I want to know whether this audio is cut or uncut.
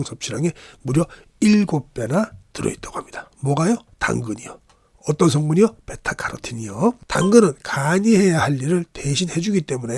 cut